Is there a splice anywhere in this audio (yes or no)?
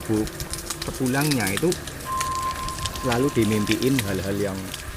no